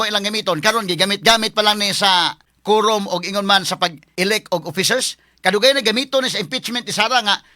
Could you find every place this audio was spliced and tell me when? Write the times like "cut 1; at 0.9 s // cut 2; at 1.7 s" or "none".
cut 1; at 2.5 s // cut 2; at 4.0 s